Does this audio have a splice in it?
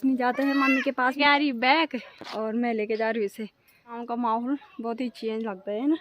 yes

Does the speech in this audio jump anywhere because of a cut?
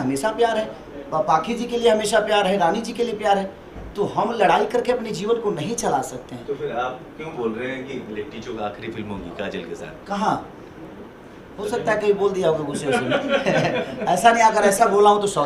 no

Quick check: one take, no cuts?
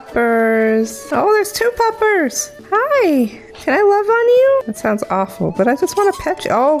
no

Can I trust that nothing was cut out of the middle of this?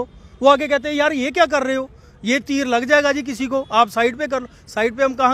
yes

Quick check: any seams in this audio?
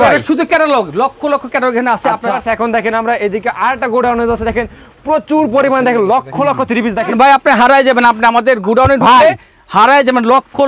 yes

